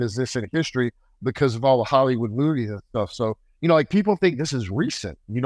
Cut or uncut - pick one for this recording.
cut